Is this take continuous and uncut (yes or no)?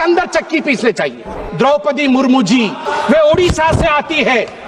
no